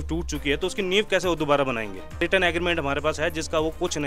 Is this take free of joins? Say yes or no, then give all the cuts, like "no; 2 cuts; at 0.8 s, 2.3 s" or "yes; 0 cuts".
no; 1 cut; at 2.2 s